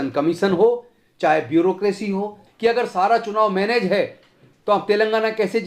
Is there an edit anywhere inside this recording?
yes; 1 cut; at 2.4 s

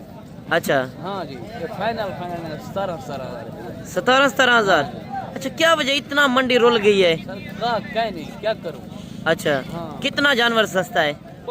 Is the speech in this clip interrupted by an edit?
no; 0 cuts

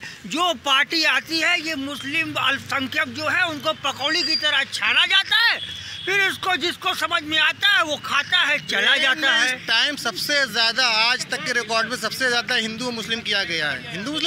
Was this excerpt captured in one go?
yes; 0 cuts

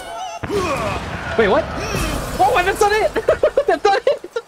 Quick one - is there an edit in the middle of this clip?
no; 0 cuts

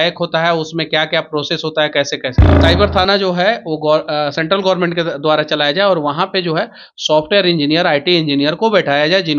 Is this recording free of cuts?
no; 1 cut; at 2.5 s

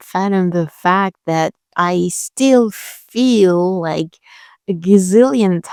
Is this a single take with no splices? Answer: yes; 0 cuts

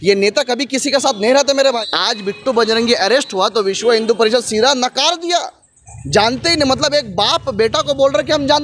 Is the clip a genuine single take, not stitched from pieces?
no; 1 cut; at 1.8 s

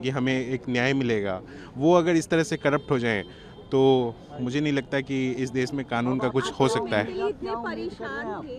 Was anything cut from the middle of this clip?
no; 0 cuts

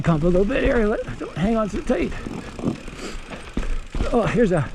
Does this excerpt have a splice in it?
no; 0 cuts

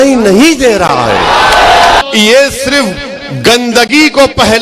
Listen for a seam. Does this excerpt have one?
yes; 1 cut; at 2.0 s

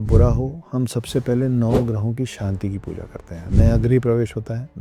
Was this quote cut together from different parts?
no; 0 cuts

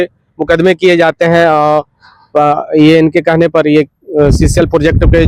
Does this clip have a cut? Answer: no; 0 cuts

